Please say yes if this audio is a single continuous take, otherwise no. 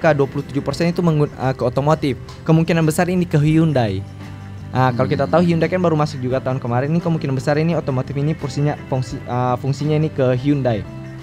yes